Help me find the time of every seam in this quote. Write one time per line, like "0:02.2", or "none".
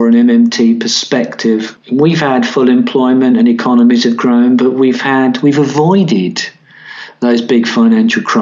0:01.8